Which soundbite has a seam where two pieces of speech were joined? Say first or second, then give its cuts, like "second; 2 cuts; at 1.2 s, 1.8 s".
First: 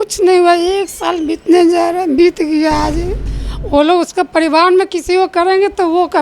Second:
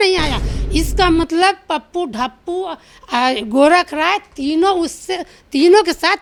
first; 1 cut; at 3.3 s